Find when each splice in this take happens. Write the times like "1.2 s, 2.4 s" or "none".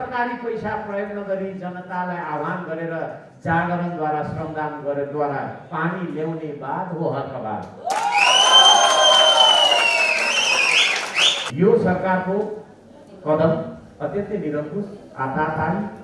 11.5 s